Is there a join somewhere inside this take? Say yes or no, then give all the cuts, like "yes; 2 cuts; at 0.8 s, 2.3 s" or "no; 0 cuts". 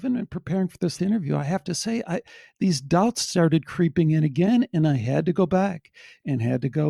yes; 1 cut; at 0.9 s